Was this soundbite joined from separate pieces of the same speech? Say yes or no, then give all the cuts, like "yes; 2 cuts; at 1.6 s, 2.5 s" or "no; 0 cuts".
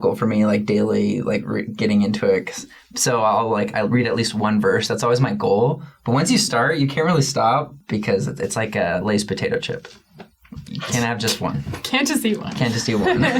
yes; 2 cuts; at 7.7 s, 10.2 s